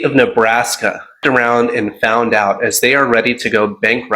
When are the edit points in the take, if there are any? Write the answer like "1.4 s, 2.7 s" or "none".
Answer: 1.2 s

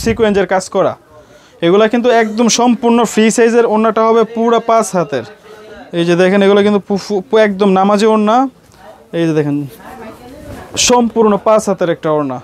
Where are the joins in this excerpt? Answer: none

